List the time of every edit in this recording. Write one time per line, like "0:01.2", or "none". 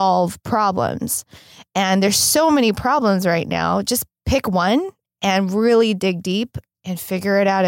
0:06.6